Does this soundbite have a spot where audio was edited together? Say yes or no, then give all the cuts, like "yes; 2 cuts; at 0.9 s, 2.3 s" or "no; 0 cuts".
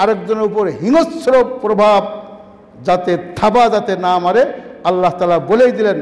no; 0 cuts